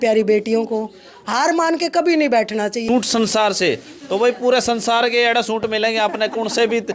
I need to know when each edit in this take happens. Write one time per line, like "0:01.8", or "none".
0:02.8